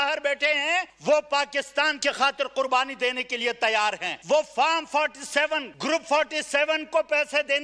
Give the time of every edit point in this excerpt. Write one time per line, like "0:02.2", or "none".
0:00.9
0:02.0
0:04.1
0:05.7